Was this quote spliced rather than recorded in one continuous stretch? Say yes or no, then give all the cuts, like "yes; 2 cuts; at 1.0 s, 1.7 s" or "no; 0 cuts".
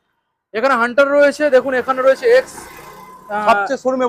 no; 0 cuts